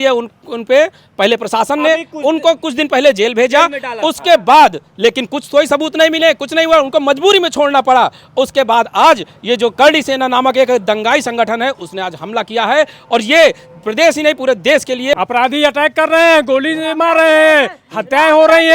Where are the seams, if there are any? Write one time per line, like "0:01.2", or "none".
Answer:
0:15.1